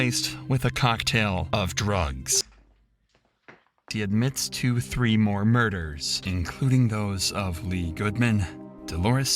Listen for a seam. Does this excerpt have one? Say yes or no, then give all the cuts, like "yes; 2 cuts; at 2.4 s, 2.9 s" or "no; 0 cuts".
yes; 1 cut; at 3.8 s